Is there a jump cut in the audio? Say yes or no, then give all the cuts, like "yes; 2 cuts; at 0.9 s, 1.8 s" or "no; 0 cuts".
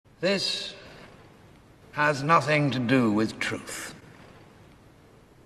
yes; 1 cut; at 1.7 s